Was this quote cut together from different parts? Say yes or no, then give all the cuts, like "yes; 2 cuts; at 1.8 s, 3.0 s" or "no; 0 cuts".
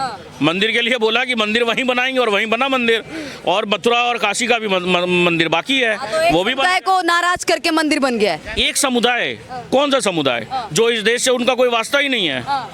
no; 0 cuts